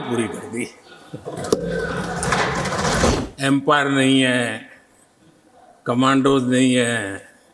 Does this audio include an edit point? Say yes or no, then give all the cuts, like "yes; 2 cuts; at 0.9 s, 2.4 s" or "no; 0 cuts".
yes; 1 cut; at 3.1 s